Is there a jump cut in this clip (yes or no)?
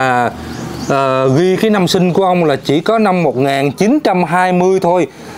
no